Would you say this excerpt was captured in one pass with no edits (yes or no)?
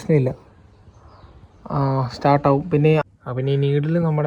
no